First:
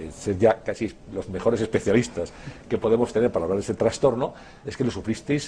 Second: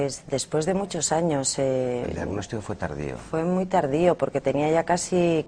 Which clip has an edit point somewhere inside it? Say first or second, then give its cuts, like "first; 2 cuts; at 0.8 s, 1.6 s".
first; 1 cut; at 4.2 s